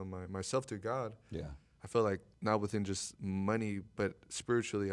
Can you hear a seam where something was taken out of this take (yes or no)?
yes